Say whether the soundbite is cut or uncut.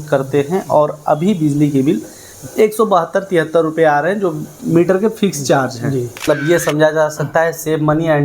cut